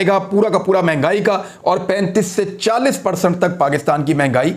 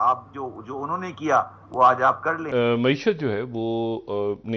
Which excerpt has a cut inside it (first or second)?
second